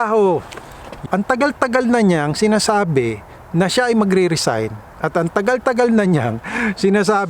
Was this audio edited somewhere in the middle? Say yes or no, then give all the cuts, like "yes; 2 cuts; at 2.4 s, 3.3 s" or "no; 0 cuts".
yes; 1 cut; at 1.0 s